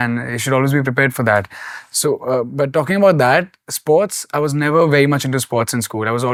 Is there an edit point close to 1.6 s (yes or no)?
no